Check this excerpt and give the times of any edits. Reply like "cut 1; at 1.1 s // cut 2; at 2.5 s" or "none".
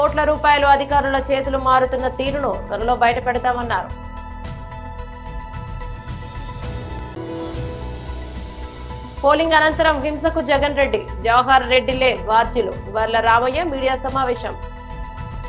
none